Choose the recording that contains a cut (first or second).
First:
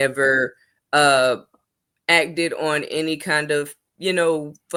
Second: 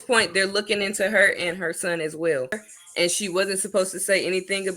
second